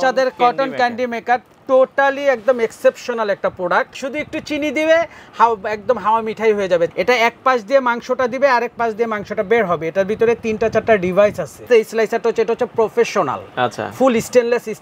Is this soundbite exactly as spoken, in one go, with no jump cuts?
no; 3 cuts; at 3.9 s, 6.9 s, 11.7 s

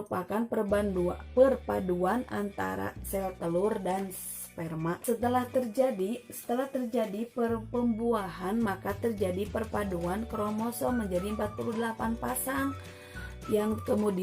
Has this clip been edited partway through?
yes; 1 cut; at 5.0 s

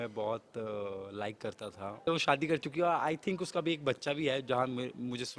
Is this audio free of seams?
no; 1 cut; at 2.0 s

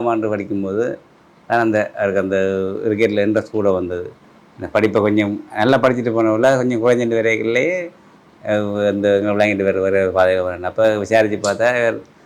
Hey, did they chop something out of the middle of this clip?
no; 0 cuts

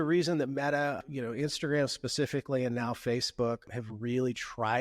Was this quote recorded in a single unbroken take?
no; 2 cuts; at 1.0 s, 3.7 s

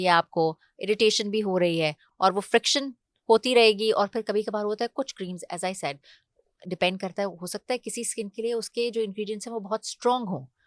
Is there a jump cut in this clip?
no; 0 cuts

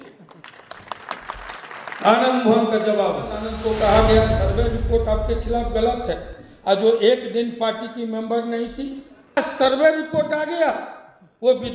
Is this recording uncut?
no; 2 cuts; at 3.5 s, 9.4 s

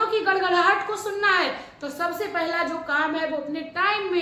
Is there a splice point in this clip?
no; 0 cuts

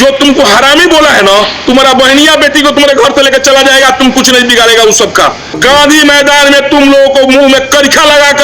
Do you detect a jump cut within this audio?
yes; 1 cut; at 5.6 s

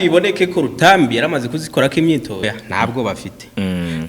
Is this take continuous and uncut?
no; 1 cut; at 2.4 s

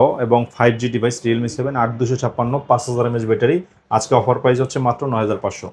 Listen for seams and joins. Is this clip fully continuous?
yes; 0 cuts

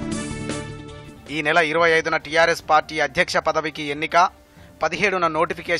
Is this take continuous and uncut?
no; 1 cut; at 0.9 s

